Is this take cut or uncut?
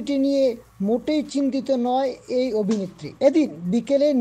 cut